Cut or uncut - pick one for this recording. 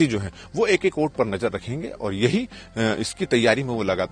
uncut